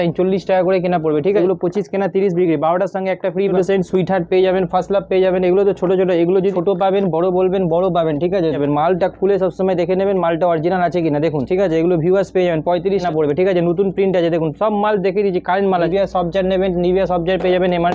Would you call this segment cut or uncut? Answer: cut